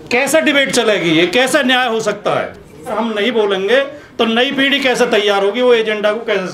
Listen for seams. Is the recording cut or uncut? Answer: cut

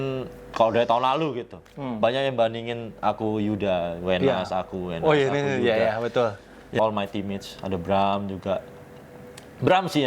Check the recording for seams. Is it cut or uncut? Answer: cut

